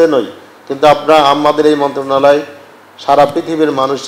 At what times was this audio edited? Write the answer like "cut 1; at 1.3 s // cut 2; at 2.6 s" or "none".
none